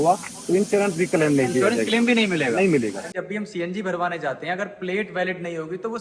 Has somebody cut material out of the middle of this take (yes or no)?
yes